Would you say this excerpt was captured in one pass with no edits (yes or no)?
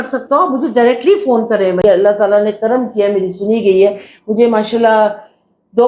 no